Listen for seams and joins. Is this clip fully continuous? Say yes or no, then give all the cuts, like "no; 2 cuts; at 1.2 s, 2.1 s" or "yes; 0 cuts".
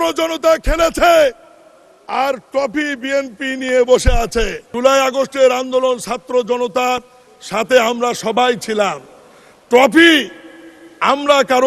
no; 1 cut; at 4.6 s